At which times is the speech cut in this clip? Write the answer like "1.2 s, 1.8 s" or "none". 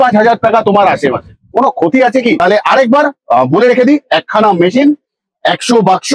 2.4 s